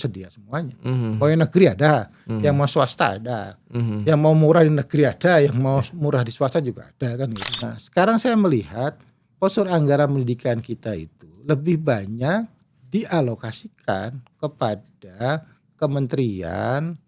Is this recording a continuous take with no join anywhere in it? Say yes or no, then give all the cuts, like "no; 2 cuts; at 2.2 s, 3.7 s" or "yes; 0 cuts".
no; 1 cut; at 7.4 s